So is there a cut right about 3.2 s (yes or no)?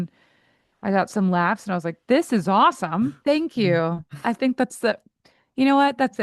yes